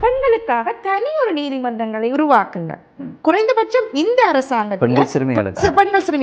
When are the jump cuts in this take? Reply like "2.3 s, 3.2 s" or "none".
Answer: none